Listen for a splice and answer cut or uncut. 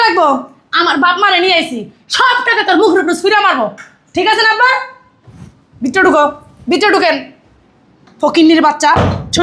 uncut